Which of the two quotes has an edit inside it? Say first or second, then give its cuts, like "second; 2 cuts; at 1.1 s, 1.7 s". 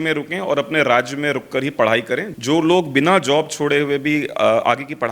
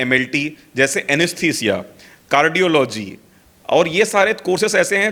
first; 1 cut; at 2.3 s